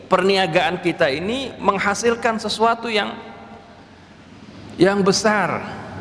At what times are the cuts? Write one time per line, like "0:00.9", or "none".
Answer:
none